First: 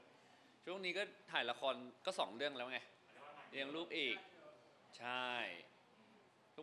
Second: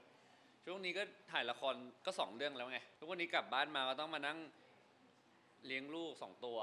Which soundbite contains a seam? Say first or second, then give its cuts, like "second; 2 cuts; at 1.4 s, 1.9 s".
second; 1 cut; at 2.9 s